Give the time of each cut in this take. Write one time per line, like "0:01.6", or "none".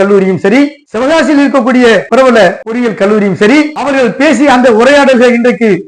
0:02.3
0:03.8

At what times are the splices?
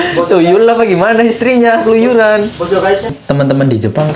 0:03.1

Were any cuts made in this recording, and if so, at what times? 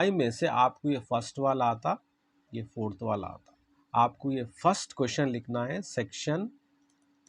0:03.7

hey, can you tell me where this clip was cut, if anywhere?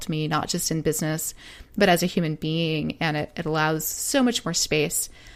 none

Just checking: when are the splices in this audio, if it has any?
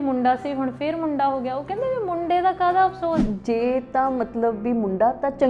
0:03.3

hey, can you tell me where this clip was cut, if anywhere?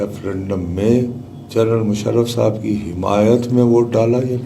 none

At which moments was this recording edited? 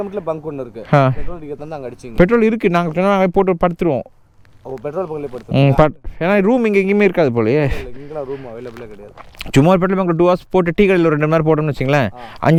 none

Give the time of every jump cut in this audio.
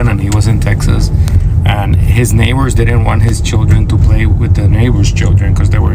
none

